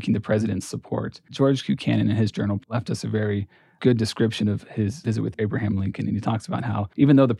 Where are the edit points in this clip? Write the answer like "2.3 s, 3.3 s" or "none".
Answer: 1.3 s